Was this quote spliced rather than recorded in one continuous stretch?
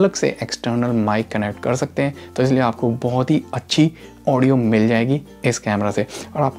no; 0 cuts

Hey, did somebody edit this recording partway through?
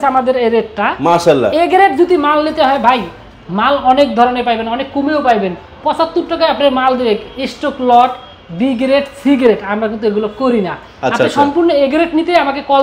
no; 0 cuts

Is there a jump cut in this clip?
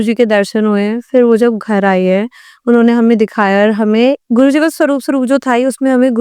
no; 0 cuts

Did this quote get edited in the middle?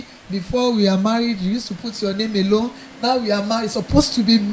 no; 0 cuts

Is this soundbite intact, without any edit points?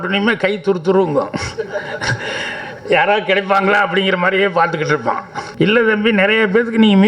no; 1 cut; at 5.4 s

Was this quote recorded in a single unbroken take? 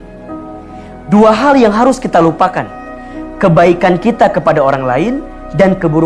yes; 0 cuts

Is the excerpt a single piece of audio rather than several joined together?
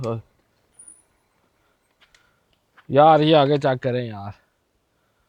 yes; 0 cuts

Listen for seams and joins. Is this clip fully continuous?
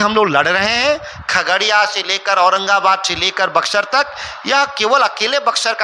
yes; 0 cuts

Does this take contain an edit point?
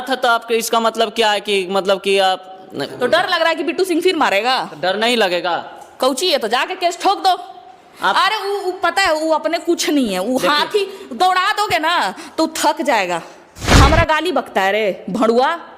yes; 1 cut; at 13.7 s

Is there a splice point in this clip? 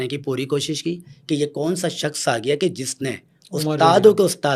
no; 0 cuts

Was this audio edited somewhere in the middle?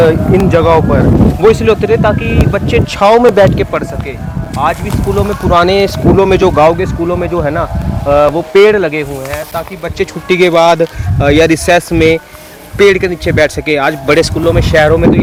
no; 0 cuts

